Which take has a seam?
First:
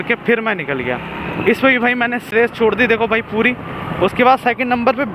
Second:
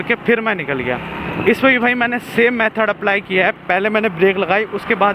first; 1 cut; at 2.3 s

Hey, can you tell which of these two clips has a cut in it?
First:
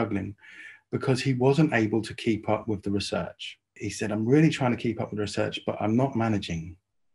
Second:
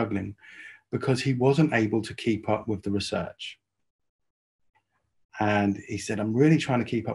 first; 1 cut; at 3.8 s

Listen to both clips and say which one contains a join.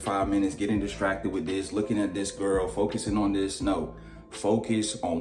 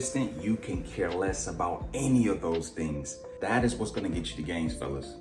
second; 1 cut; at 3.3 s

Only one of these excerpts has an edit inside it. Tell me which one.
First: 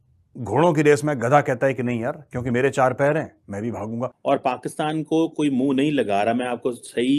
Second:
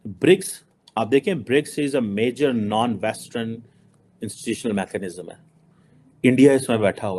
first; 1 cut; at 4.1 s

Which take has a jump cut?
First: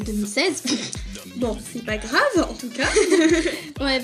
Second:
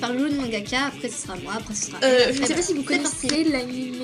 second; 1 cut; at 1.8 s

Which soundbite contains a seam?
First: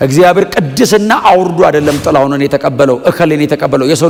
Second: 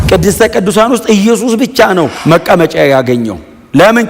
second; 1 cut; at 2.2 s

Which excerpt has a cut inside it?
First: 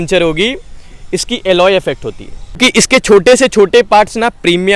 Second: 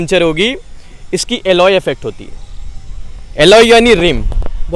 first; 1 cut; at 2.6 s

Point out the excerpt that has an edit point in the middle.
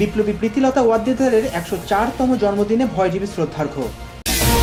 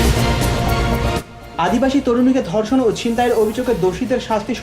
second; 1 cut; at 1.1 s

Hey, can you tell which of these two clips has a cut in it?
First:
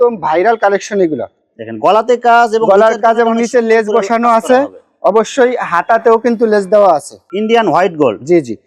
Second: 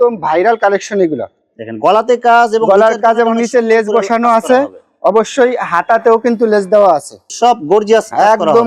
first; 1 cut; at 7.2 s

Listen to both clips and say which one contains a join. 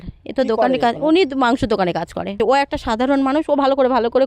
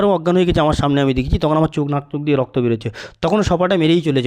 first; 1 cut; at 2.3 s

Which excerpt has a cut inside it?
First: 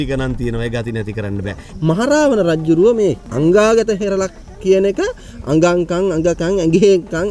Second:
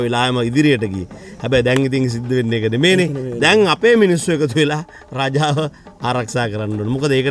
first; 2 cuts; at 1.7 s, 3.3 s

